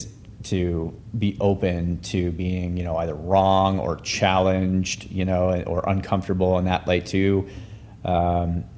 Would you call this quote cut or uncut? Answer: uncut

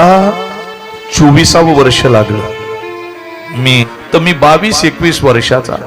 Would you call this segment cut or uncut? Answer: cut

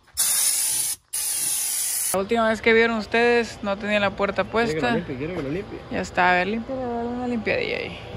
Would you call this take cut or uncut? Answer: cut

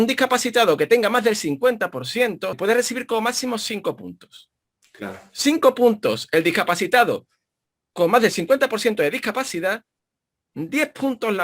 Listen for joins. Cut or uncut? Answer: cut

